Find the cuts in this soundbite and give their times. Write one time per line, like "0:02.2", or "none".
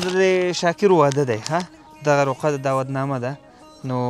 none